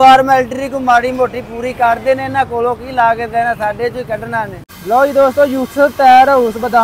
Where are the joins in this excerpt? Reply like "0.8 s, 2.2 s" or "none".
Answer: 4.7 s